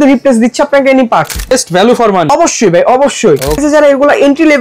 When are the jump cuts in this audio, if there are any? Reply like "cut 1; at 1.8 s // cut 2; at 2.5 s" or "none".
cut 1; at 1.5 s // cut 2; at 2.3 s // cut 3; at 3.6 s

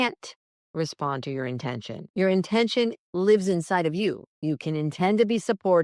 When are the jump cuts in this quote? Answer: cut 1; at 2.0 s // cut 2; at 3.0 s // cut 3; at 4.3 s

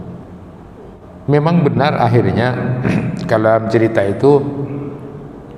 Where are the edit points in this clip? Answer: cut 1; at 1.0 s

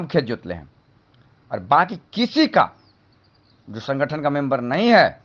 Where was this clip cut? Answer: none

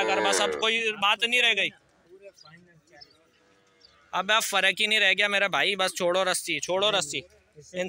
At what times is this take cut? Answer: none

